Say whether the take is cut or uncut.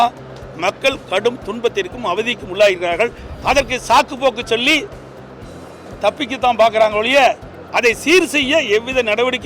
cut